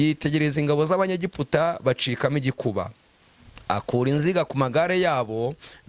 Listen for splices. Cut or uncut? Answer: uncut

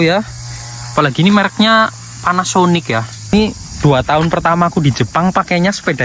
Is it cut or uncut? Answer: cut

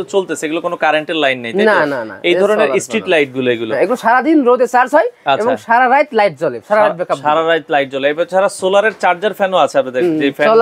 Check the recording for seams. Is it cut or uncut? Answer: uncut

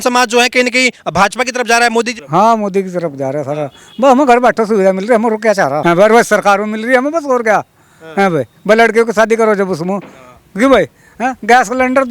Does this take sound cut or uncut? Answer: cut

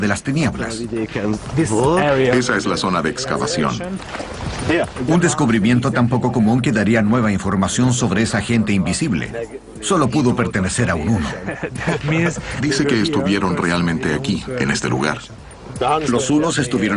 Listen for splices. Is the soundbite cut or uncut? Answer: cut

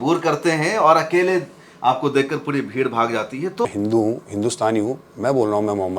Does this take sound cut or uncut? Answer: cut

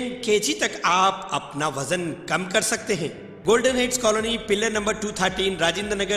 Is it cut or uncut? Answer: cut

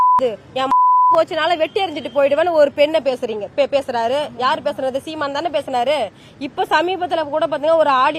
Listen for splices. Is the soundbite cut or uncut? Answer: uncut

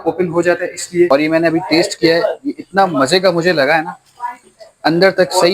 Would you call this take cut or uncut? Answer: cut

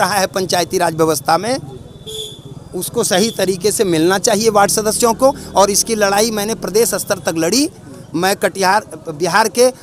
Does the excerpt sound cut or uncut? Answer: uncut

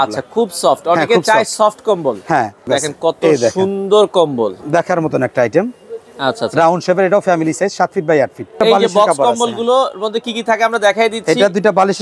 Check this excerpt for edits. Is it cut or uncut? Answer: cut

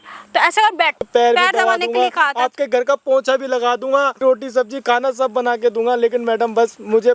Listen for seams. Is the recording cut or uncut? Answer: cut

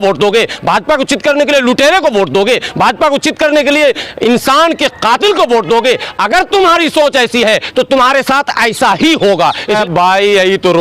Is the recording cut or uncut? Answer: cut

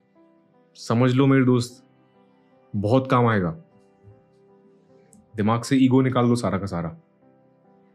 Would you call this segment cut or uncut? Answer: cut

